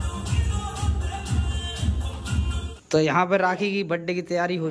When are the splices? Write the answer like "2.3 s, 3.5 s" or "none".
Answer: 2.8 s